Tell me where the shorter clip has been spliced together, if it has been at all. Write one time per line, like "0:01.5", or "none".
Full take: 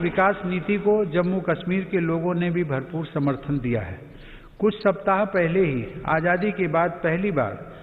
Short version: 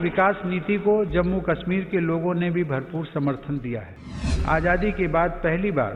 0:04.3